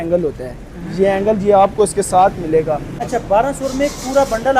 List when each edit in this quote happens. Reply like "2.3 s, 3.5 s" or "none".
2.9 s